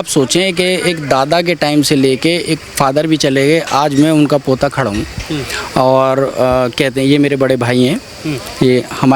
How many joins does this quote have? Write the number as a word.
zero